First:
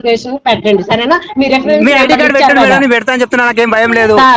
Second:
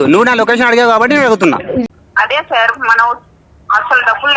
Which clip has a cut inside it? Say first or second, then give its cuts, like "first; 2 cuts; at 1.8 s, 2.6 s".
second; 1 cut; at 1.9 s